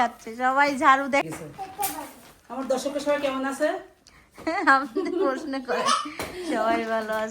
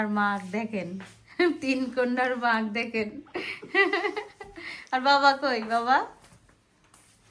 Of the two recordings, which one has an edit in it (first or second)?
first